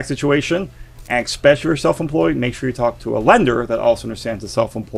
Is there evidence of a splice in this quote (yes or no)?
no